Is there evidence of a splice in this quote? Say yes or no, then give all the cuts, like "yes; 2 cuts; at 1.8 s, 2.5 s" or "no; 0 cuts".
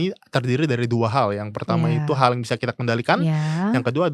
no; 0 cuts